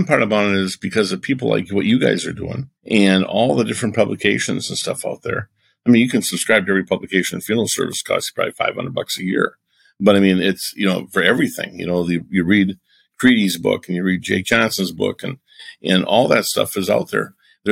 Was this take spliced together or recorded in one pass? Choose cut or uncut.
uncut